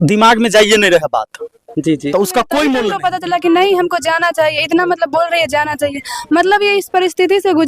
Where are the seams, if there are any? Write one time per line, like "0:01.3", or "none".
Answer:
0:02.9